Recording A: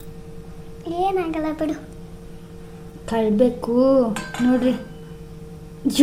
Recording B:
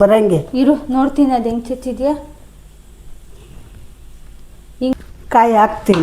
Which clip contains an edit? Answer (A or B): B